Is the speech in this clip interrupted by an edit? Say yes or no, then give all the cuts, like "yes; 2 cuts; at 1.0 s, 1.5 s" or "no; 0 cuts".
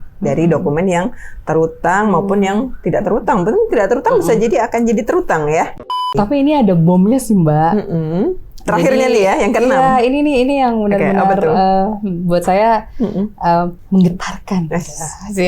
yes; 1 cut; at 5.8 s